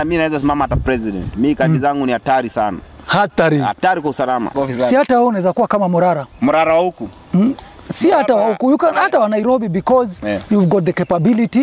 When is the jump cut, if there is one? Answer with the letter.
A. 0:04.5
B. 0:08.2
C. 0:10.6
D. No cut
A